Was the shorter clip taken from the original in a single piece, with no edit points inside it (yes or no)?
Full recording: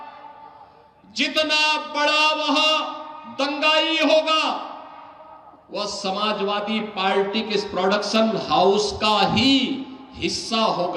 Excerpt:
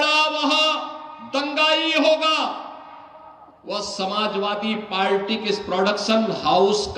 yes